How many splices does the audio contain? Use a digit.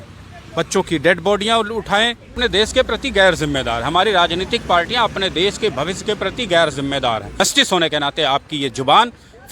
2